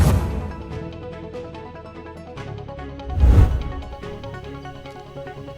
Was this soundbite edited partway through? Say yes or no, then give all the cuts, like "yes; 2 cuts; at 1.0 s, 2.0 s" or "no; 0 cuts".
yes; 1 cut; at 3.9 s